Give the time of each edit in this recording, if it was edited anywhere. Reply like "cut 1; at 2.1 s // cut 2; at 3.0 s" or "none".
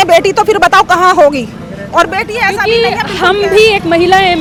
none